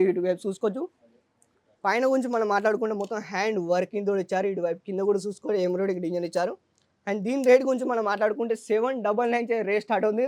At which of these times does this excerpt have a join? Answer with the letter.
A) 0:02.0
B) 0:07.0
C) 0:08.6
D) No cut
D